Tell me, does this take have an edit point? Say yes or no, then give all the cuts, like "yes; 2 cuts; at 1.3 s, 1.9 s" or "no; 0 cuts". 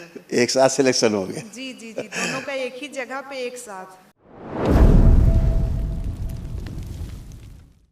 yes; 1 cut; at 3.9 s